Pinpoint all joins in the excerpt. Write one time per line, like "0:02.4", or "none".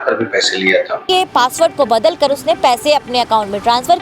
0:01.0